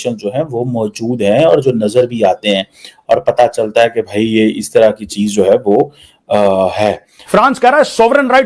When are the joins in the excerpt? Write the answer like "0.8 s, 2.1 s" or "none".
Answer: 7.1 s